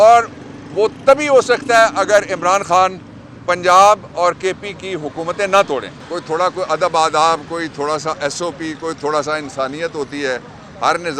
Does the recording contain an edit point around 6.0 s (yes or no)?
yes